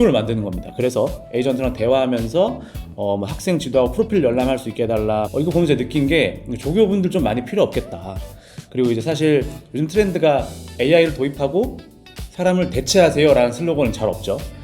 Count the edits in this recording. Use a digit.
1